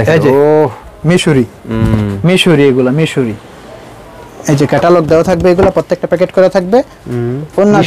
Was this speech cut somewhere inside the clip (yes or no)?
no